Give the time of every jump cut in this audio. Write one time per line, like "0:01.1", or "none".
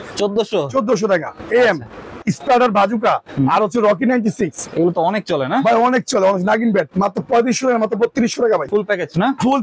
0:02.3
0:04.6
0:08.7